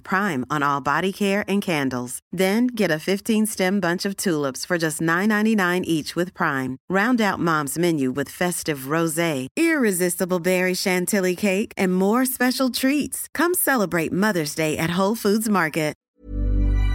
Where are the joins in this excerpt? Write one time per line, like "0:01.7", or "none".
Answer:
0:16.0